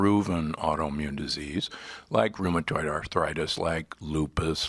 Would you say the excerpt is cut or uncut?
cut